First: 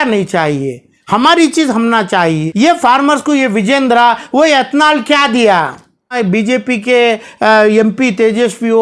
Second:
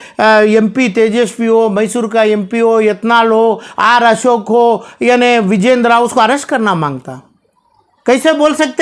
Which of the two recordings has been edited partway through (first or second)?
first